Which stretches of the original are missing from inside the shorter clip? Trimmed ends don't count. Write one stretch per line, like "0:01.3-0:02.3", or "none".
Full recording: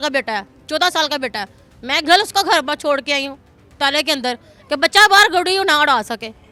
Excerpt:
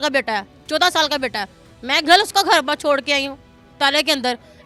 none

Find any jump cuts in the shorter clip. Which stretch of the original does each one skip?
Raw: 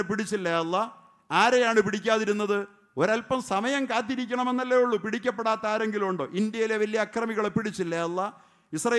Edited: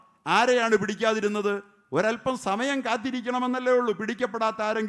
none

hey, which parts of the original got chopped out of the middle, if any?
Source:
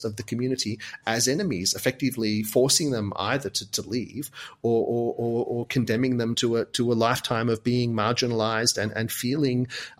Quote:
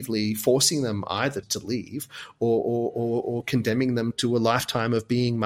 0:03.6-0:03.7
0:06.4-0:06.7

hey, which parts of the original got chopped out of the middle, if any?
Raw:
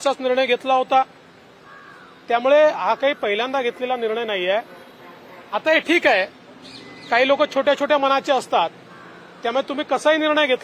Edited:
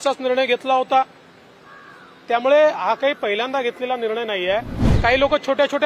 0:04.8-0:06.9

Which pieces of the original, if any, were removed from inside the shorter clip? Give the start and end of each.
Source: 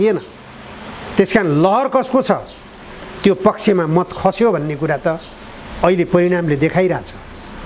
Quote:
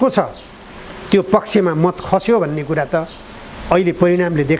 none

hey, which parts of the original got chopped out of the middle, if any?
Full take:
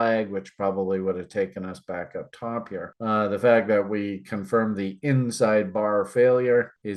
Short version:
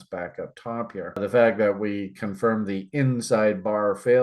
0:02.9-0:03.3

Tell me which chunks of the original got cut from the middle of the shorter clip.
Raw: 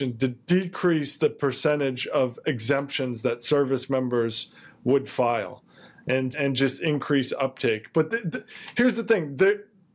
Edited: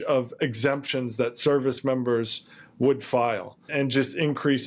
0:05.7-0:06.3

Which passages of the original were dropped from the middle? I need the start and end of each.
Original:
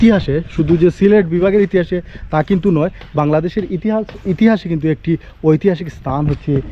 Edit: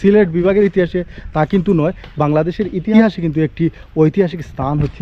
0:03.9-0:04.4

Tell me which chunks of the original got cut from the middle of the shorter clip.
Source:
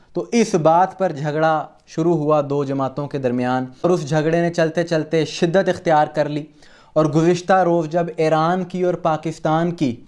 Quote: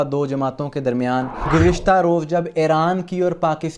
0:03.8-0:07.1

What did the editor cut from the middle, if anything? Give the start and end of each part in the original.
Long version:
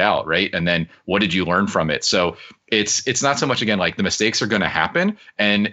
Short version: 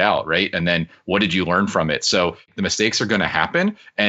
0:02.5-0:03.9

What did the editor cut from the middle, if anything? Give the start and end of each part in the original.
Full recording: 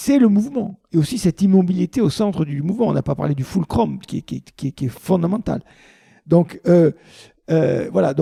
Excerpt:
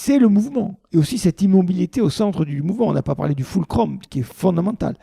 0:04.1-0:04.7

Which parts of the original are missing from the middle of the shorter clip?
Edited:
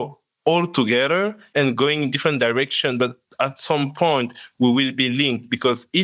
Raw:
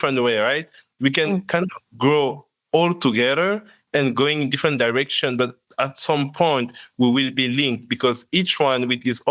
0:03.7-0:03.8

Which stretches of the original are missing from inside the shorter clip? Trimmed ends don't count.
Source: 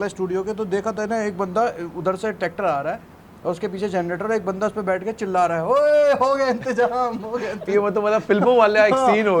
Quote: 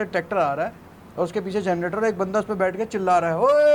none

